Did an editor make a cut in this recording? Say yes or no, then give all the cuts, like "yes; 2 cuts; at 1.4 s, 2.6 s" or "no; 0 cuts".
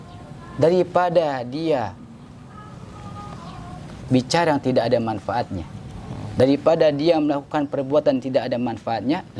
no; 0 cuts